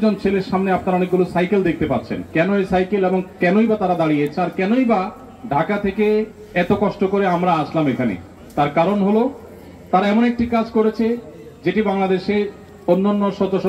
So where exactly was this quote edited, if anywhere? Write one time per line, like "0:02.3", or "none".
none